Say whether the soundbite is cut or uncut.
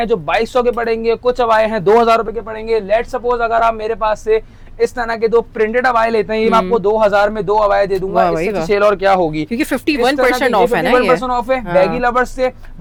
uncut